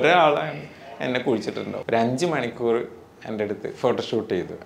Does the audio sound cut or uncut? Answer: cut